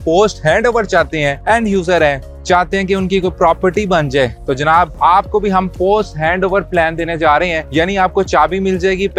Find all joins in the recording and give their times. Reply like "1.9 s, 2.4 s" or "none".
none